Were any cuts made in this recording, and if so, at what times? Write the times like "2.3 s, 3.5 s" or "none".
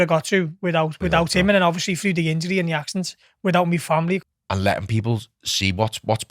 4.2 s